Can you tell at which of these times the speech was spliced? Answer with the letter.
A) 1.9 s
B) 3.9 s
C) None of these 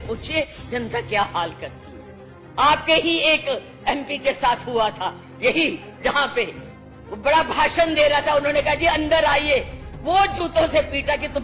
C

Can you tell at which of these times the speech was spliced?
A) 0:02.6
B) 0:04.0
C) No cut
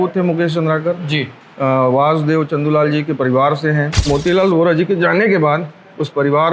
B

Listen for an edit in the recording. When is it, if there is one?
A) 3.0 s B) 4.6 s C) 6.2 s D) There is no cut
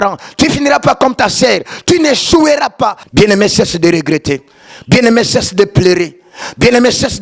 A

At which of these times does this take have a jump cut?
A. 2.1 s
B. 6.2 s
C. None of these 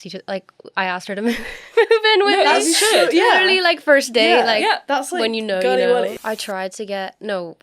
B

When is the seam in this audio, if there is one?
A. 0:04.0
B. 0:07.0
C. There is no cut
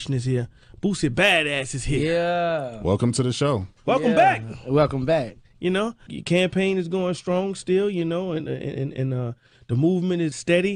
C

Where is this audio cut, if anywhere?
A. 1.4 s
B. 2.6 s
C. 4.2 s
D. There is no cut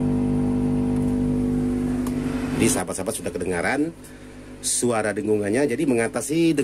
B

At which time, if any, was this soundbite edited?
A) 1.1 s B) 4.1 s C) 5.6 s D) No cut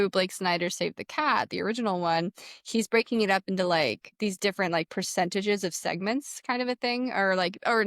B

